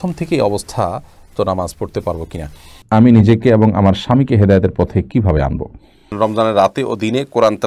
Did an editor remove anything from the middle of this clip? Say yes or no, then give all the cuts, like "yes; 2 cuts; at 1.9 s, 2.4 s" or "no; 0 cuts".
yes; 2 cuts; at 2.7 s, 6.1 s